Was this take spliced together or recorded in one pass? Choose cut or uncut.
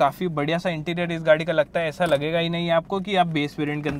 uncut